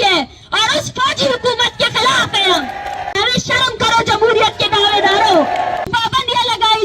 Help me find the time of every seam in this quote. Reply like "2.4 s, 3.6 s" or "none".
3.1 s, 5.9 s